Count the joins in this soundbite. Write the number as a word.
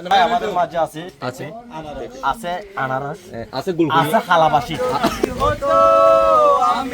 one